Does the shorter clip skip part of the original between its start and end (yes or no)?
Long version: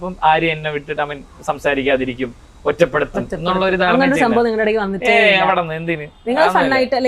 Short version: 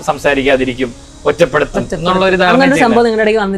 no